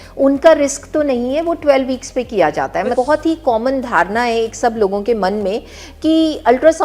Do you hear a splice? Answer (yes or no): yes